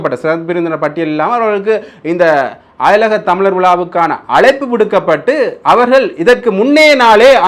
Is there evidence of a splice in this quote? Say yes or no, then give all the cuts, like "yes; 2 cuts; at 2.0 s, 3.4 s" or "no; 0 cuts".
no; 0 cuts